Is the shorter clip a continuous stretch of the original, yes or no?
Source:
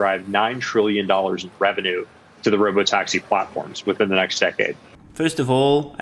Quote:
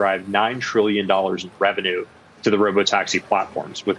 yes